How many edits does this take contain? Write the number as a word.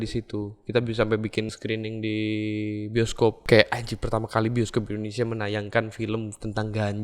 two